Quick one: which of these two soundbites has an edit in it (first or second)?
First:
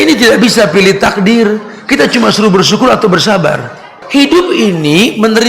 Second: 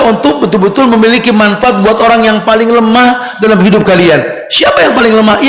first